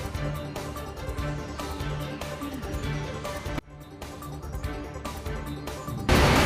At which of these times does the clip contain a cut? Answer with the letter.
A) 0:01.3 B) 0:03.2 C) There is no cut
C